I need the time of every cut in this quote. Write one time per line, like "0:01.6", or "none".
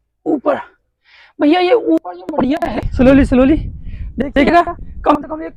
0:02.8